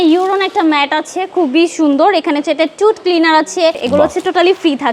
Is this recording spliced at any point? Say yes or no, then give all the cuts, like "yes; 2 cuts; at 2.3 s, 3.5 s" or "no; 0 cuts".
yes; 1 cut; at 3.8 s